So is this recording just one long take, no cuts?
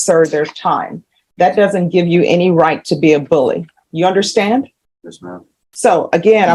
yes; 0 cuts

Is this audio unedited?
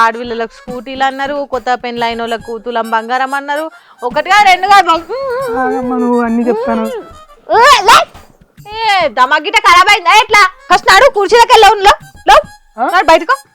no; 1 cut; at 10.6 s

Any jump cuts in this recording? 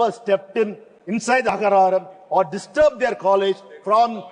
no; 0 cuts

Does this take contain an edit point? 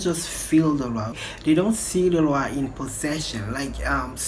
yes; 1 cut; at 1.2 s

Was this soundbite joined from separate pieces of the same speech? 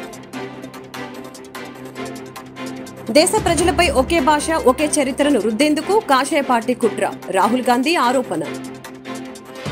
yes; 2 cuts; at 1.3 s, 2.1 s

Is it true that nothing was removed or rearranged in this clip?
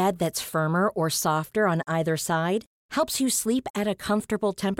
yes; 0 cuts

